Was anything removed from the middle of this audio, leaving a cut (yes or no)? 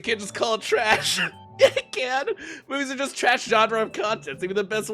no